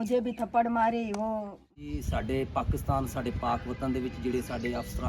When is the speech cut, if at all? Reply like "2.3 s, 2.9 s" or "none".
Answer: 1.7 s